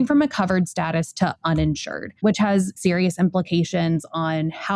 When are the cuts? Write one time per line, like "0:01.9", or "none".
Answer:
0:02.8

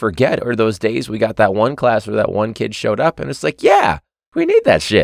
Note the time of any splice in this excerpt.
0:04.1

